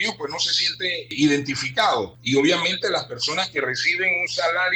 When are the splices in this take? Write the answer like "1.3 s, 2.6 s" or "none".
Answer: 1.1 s, 2.2 s

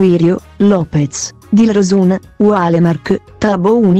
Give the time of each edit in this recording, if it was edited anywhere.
1.7 s

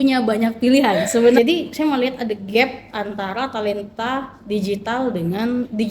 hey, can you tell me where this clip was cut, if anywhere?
1.4 s

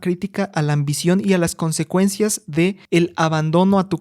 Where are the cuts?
2.8 s

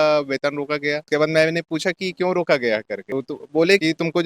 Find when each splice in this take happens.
none

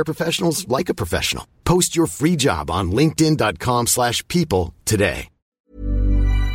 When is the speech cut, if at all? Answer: 5.5 s

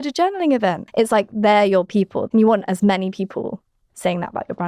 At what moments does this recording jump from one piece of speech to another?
0.8 s, 2.3 s

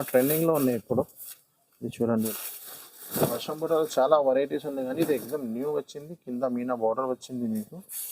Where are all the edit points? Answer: 2.3 s

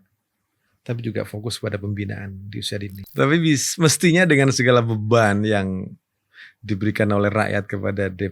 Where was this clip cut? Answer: 3.0 s

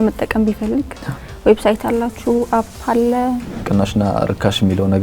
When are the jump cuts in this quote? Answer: 3.5 s

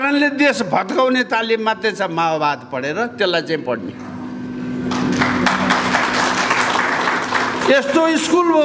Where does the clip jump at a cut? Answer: none

